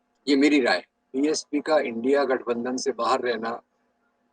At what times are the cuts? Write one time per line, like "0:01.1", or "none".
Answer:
0:01.0